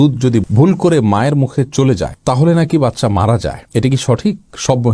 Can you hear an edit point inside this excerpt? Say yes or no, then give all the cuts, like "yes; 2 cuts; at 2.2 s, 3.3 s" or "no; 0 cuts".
no; 0 cuts